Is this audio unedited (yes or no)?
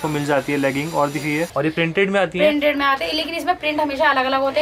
no